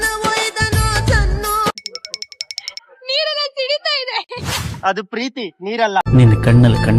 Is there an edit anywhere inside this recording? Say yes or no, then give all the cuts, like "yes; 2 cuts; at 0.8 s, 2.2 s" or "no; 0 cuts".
no; 0 cuts